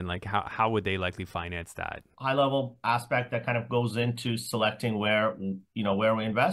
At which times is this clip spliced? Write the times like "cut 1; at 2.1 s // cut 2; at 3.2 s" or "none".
cut 1; at 2.1 s